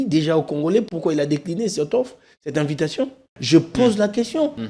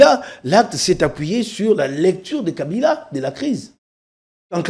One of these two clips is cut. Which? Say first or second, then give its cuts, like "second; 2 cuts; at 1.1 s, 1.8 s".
first; 1 cut; at 3.4 s